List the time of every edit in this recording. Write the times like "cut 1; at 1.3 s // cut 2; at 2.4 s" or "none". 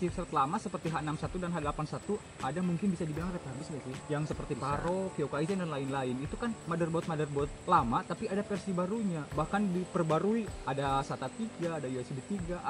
none